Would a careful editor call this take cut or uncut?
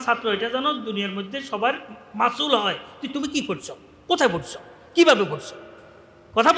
uncut